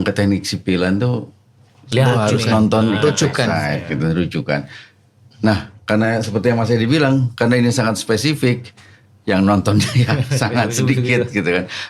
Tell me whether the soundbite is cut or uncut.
uncut